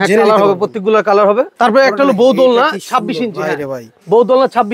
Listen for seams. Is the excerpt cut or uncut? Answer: cut